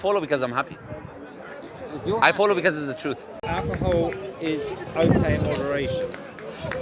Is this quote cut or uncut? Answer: cut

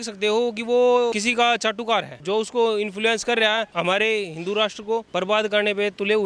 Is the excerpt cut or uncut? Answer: cut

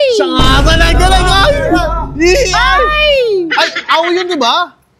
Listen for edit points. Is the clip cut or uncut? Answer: uncut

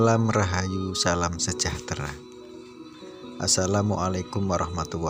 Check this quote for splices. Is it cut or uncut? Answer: uncut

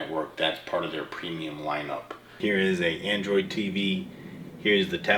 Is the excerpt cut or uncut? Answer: cut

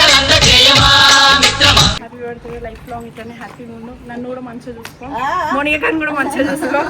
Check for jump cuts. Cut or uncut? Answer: cut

